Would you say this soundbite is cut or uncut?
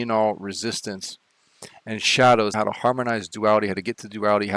cut